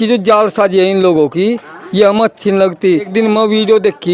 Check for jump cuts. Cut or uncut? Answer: cut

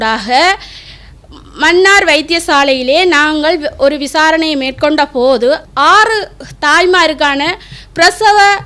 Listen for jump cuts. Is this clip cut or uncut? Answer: cut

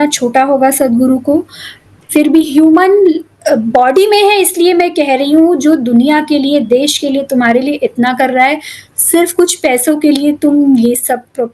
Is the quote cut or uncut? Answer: uncut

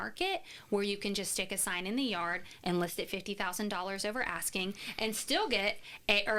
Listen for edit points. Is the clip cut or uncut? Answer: uncut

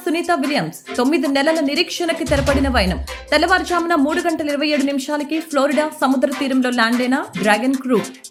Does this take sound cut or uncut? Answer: uncut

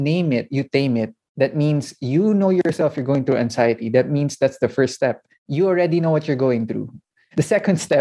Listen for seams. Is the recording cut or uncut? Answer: uncut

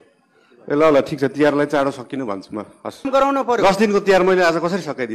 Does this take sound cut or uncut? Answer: cut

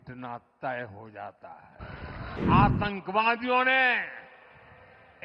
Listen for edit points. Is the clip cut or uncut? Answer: cut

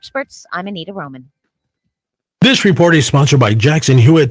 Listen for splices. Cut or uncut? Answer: cut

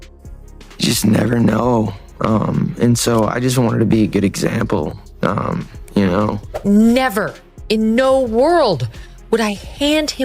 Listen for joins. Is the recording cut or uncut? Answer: cut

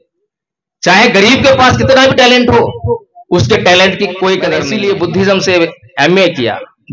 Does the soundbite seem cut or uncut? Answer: cut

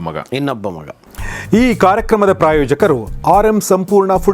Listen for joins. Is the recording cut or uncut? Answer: cut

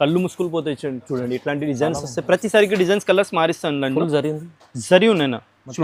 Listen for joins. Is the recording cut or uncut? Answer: uncut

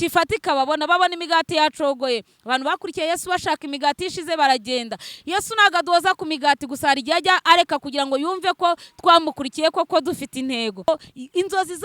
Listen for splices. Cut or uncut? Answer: cut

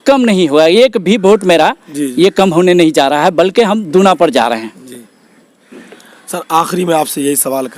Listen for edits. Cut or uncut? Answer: uncut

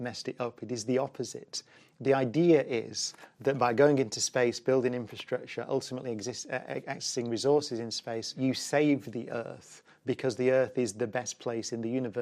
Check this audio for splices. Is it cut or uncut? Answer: cut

